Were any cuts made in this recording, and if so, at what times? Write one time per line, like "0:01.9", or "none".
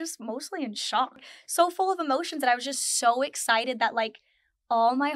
0:01.2